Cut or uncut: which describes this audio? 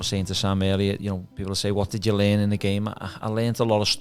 cut